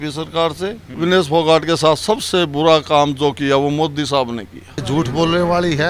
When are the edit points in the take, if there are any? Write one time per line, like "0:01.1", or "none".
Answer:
0:00.9
0:04.8